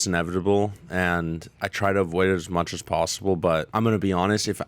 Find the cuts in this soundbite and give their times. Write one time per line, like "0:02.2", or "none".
0:03.7